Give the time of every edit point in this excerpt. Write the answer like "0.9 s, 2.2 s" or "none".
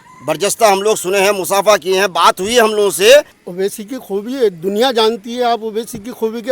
3.4 s